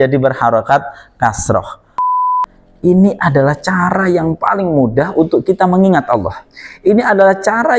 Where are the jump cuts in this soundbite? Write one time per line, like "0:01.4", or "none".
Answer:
0:02.1